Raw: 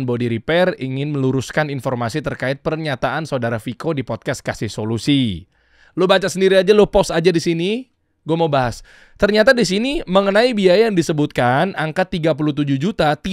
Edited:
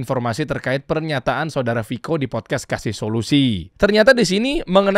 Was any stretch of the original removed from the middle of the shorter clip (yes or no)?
yes